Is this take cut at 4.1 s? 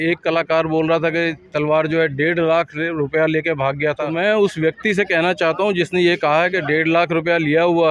yes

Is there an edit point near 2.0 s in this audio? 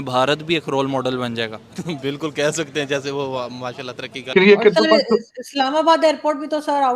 no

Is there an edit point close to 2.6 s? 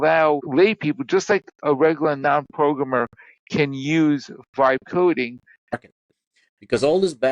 no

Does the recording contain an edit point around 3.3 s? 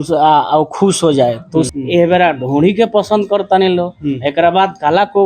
no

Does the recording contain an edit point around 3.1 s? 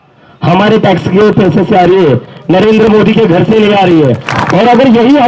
no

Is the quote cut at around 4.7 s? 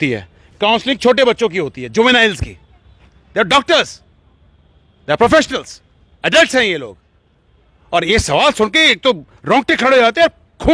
no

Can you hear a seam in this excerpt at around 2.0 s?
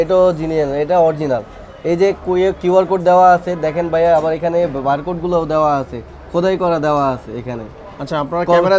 no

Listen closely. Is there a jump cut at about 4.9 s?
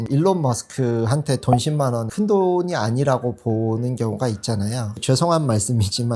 yes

